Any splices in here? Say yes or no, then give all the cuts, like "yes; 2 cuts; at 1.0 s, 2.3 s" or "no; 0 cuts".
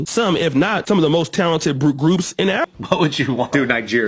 yes; 1 cut; at 2.7 s